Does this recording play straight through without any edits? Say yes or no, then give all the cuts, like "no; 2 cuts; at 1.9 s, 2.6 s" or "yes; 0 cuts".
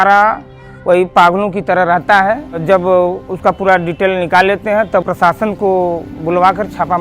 no; 2 cuts; at 2.6 s, 5.0 s